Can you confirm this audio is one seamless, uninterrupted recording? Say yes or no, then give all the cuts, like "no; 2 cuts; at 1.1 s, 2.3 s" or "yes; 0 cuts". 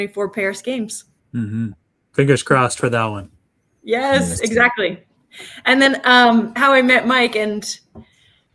yes; 0 cuts